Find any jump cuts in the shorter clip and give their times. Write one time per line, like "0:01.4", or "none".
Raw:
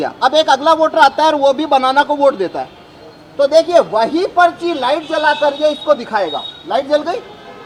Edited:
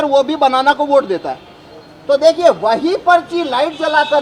none